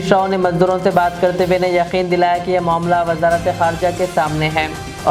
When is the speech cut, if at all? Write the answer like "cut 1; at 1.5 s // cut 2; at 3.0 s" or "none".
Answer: none